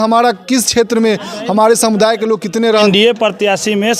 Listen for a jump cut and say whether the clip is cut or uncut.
cut